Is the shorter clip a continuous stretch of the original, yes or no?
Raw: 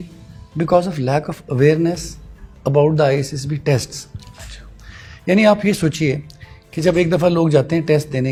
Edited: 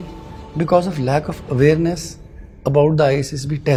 yes